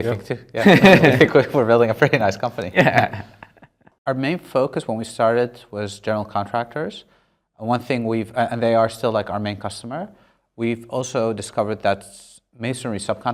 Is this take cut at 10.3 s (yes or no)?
no